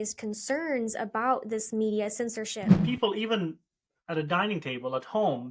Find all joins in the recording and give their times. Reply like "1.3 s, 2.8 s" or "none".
2.7 s